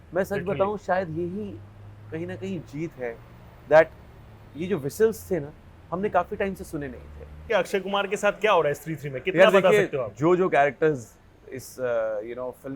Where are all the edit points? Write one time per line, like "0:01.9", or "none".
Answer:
0:07.5